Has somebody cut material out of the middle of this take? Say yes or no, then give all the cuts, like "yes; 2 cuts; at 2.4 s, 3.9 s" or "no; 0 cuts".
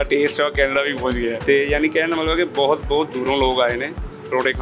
yes; 1 cut; at 1.4 s